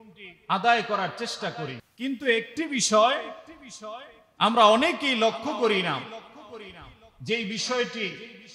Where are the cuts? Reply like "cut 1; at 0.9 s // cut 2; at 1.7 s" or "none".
cut 1; at 1.8 s